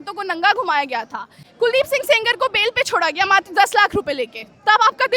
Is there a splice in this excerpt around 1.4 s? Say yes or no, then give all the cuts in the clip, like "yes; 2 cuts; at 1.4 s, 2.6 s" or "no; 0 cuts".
yes; 1 cut; at 1.4 s